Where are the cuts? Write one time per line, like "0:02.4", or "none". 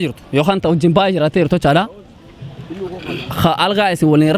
none